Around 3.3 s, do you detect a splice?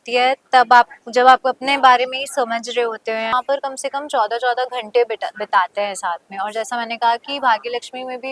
yes; 1 cut; at 3.3 s

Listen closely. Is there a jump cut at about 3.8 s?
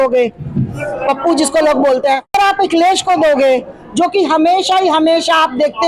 no; 1 cut; at 2.4 s

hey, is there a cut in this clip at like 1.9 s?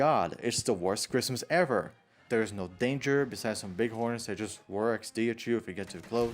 yes; 1 cut; at 1.9 s

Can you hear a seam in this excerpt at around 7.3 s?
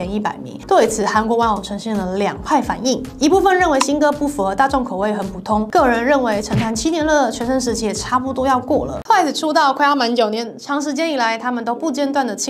no; 1 cut; at 8.9 s

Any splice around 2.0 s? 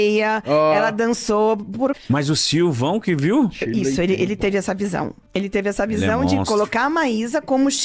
yes; 2 cuts; at 2.0 s, 5.2 s

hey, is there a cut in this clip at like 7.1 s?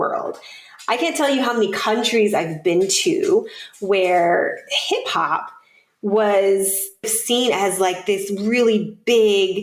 yes; 1 cut; at 7.1 s

